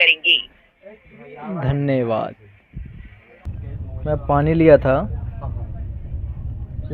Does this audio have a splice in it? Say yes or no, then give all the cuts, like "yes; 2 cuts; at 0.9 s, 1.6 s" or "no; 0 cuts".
yes; 1 cut; at 3.5 s